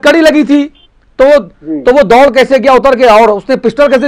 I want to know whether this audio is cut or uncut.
uncut